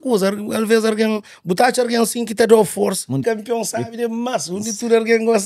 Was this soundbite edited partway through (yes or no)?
yes